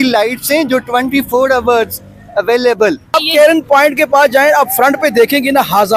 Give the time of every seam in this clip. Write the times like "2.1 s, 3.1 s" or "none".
3.1 s